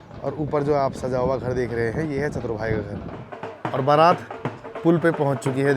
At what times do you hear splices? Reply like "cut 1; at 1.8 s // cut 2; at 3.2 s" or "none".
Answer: cut 1; at 3.2 s